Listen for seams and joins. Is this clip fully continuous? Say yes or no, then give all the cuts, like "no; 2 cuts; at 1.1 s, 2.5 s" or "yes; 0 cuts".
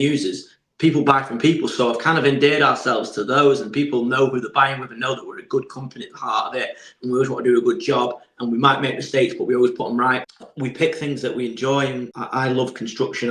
no; 2 cuts; at 10.3 s, 12.1 s